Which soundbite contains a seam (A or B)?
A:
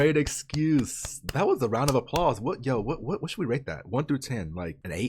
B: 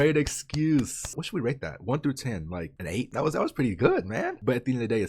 B